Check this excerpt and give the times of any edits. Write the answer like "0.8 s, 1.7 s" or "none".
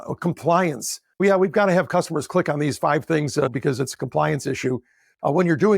3.5 s

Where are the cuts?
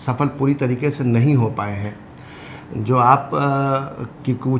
none

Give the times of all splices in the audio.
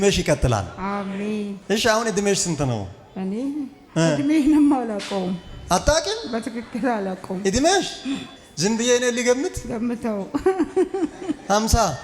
1.6 s

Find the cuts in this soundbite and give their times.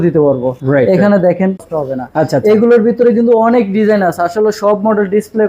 1.7 s

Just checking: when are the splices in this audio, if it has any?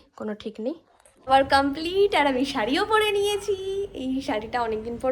1.3 s

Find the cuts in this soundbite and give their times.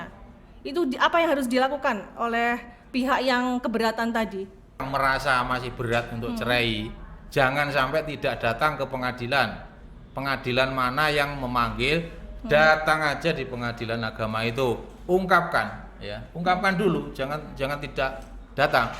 4.8 s

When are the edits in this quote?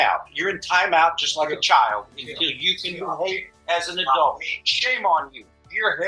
1.2 s

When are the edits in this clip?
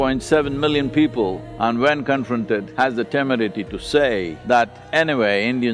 1.5 s, 2.7 s, 4.3 s

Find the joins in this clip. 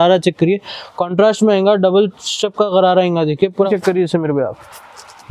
3.6 s

